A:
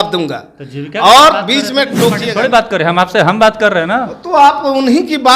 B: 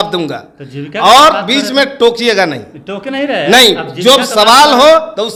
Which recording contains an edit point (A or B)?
A